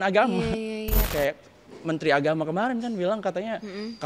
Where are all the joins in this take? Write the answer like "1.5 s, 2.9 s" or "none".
1.1 s

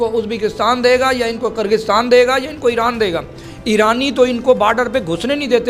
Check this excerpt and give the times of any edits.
none

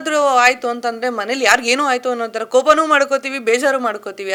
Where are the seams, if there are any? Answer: none

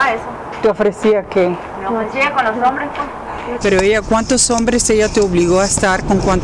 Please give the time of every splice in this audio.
3.4 s

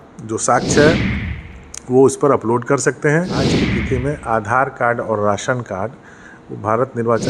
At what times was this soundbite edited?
3.6 s

